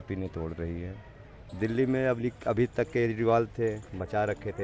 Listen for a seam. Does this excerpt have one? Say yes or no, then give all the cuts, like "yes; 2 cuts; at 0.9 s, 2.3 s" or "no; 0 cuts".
yes; 1 cut; at 1.4 s